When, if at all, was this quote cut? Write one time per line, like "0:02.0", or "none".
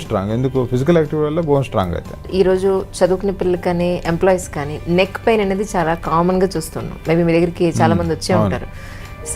0:02.3